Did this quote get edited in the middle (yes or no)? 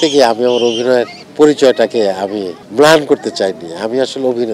yes